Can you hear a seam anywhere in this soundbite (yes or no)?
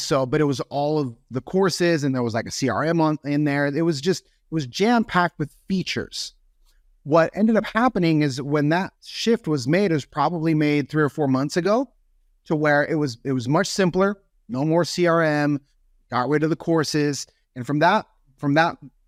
no